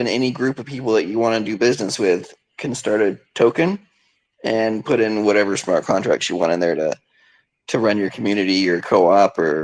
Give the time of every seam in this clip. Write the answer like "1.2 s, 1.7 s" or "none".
none